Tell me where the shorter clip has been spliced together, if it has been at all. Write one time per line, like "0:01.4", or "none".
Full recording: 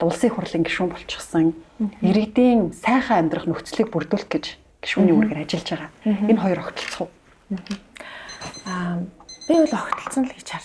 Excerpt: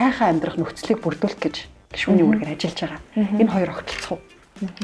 none